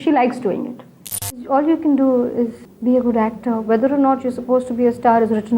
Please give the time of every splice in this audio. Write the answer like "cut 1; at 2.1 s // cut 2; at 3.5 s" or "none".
cut 1; at 1.3 s // cut 2; at 2.7 s